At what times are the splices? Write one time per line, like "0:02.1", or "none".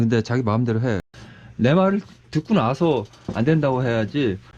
0:01.0